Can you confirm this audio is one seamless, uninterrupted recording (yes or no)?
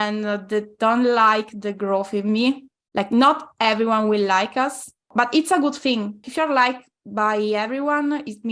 no